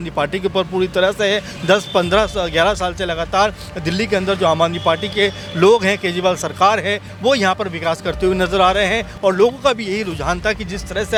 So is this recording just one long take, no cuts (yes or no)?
yes